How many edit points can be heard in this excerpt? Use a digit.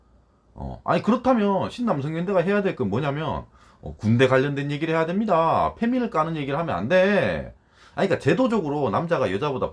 0